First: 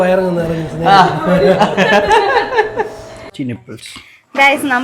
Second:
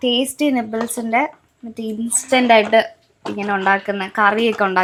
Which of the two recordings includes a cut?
first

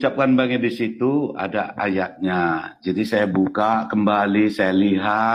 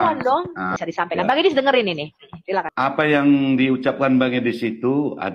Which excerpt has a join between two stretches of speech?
second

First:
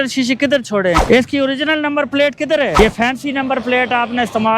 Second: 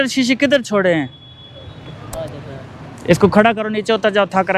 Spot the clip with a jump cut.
first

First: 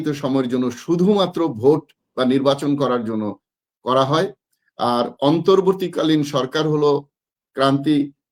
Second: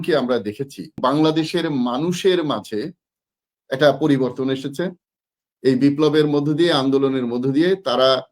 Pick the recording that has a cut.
second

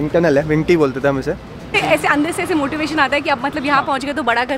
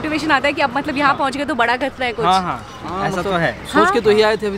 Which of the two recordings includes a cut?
first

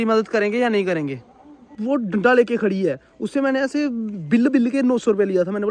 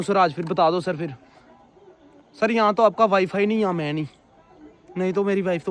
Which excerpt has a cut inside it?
first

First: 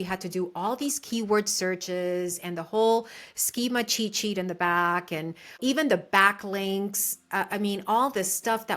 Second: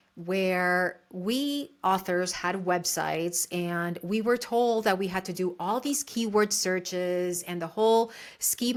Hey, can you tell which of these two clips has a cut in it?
first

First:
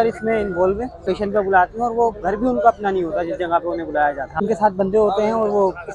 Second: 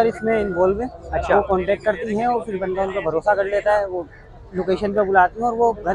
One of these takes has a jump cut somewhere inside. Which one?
first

